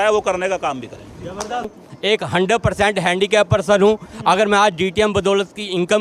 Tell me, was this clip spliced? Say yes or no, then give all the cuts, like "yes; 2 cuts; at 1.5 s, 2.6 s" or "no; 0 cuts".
yes; 1 cut; at 1.8 s